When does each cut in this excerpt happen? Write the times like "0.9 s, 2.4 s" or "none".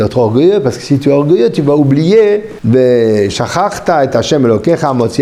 2.5 s